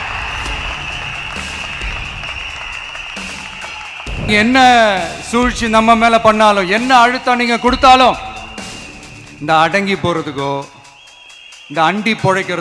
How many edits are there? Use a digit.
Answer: 1